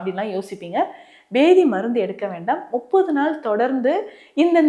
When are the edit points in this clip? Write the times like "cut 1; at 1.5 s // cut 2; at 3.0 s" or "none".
none

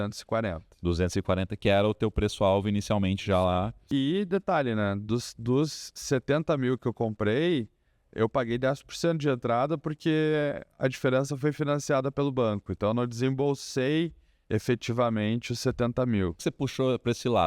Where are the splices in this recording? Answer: cut 1; at 3.8 s // cut 2; at 16.4 s

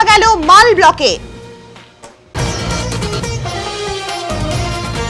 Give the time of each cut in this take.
cut 1; at 2.2 s

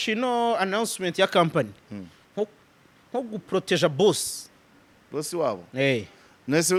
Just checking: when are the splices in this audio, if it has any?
none

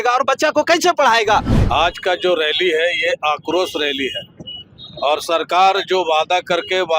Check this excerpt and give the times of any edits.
cut 1; at 1.5 s

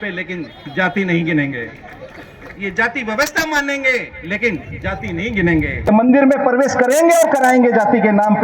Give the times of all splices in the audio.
cut 1; at 5.9 s

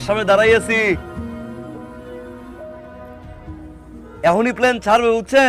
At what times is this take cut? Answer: none

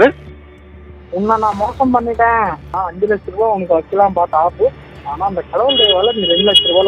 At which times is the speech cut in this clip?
cut 1; at 2.7 s

